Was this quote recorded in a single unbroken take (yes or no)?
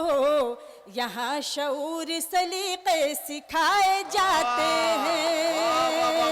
yes